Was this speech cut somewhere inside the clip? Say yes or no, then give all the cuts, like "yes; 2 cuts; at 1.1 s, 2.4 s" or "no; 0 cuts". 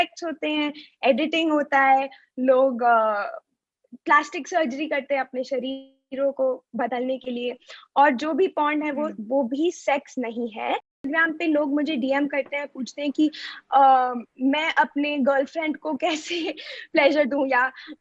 yes; 1 cut; at 11.0 s